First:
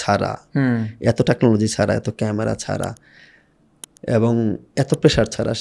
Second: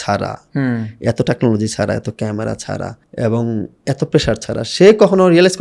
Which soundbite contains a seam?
second; 1 cut; at 3.0 s

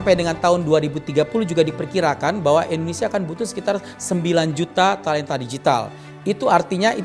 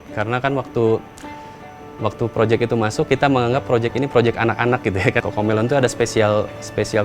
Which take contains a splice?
second; 1 cut; at 5.2 s

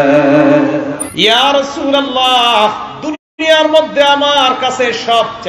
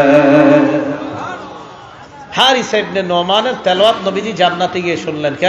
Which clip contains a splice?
first; 1 cut; at 1.0 s

